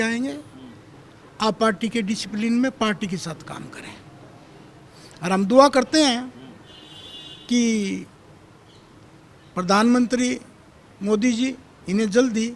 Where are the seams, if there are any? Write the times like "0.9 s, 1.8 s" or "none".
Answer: none

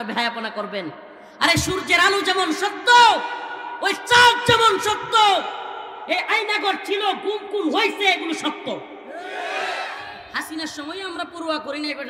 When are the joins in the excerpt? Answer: 10.2 s

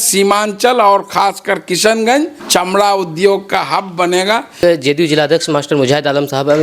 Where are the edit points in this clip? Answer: 2.4 s, 4.5 s

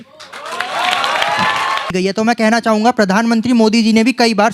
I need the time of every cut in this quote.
1.9 s

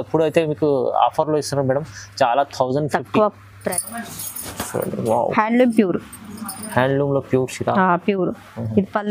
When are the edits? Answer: 3.5 s

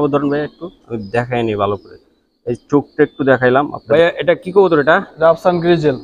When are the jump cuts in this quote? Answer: 3.8 s

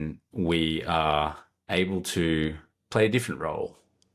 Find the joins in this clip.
1.5 s, 2.7 s

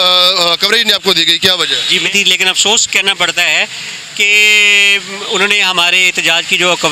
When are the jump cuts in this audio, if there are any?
2.0 s

